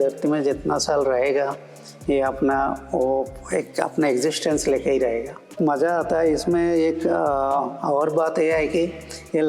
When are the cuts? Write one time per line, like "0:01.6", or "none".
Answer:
0:05.5